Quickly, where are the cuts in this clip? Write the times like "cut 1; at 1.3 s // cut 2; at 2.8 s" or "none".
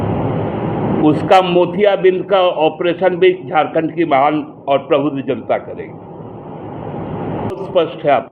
none